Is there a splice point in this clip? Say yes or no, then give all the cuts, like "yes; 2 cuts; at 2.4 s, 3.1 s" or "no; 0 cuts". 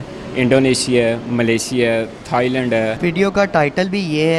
yes; 1 cut; at 3.0 s